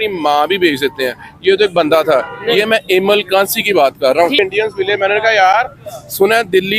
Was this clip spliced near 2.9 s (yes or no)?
no